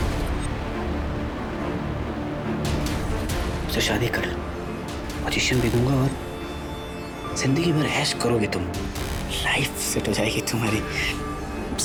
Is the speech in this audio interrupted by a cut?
no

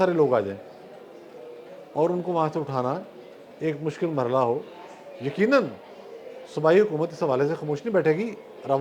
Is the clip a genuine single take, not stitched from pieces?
yes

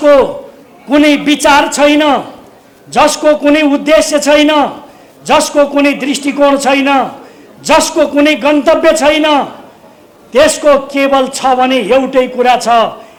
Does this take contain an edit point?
no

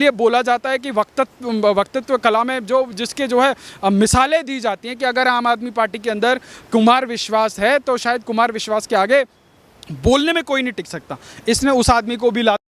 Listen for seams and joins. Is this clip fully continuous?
yes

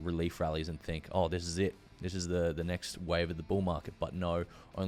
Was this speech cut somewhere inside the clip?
no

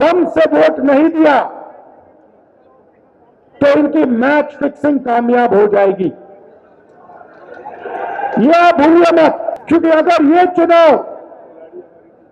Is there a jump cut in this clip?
yes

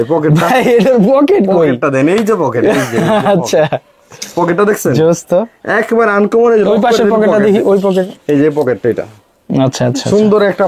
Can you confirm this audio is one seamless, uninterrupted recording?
yes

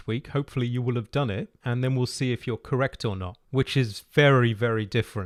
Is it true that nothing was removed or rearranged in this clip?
yes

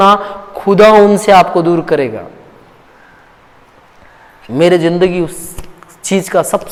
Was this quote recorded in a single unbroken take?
yes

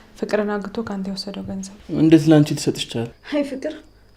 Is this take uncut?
no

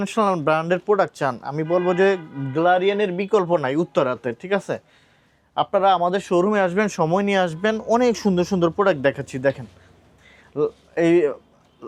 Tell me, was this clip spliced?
no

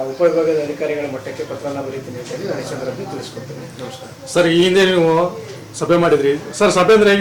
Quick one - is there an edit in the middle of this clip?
no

